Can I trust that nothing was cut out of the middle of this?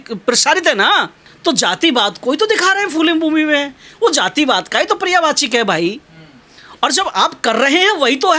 no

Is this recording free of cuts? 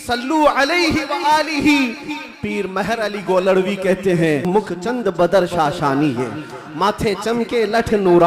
no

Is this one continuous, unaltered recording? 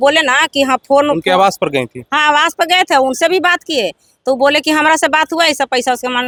yes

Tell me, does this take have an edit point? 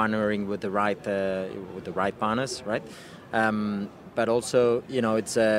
no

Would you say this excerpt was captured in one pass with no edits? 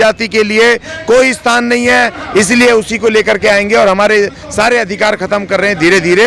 yes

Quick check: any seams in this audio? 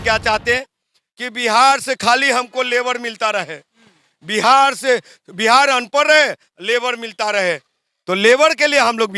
no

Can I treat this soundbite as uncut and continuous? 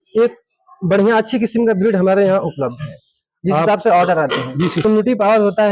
no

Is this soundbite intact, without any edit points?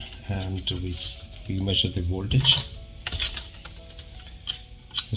yes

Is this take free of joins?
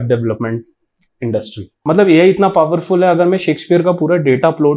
no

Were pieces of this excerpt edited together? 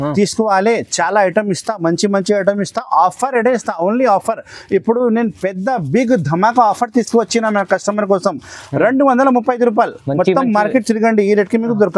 no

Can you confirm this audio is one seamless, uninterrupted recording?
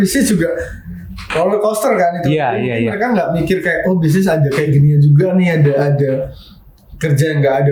yes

